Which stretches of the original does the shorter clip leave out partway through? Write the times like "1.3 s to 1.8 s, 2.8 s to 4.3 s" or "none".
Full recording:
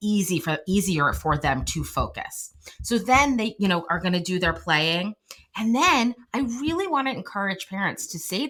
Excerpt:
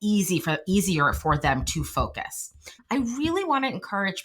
2.8 s to 6.2 s